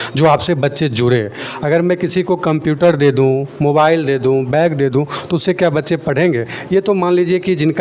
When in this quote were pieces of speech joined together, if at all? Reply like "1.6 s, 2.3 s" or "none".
none